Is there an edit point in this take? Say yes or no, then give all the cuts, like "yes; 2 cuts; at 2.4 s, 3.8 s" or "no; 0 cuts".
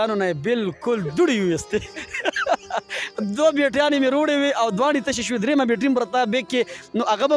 no; 0 cuts